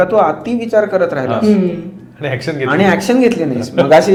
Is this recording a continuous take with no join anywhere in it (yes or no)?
yes